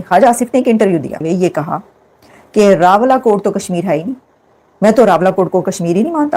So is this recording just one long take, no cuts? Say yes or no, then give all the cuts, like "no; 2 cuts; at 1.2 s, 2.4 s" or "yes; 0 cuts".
no; 1 cut; at 1.2 s